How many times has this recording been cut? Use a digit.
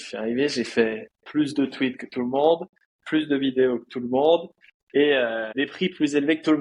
1